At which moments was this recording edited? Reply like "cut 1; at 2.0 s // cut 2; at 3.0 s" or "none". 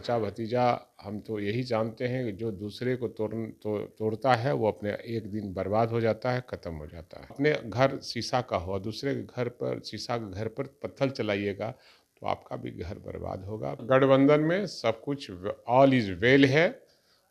cut 1; at 7.3 s // cut 2; at 13.8 s